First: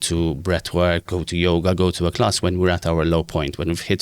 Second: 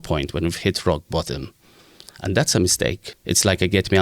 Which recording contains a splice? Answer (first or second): second